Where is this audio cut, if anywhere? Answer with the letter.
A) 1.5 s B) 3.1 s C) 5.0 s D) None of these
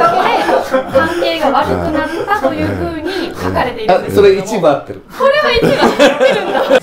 D